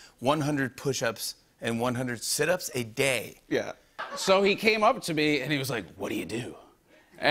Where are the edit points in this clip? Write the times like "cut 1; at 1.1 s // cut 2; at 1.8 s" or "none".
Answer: cut 1; at 3.9 s

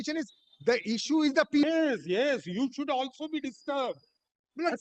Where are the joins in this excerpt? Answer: cut 1; at 1.6 s

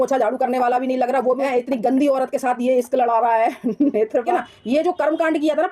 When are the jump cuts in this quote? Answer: cut 1; at 1.4 s // cut 2; at 4.3 s

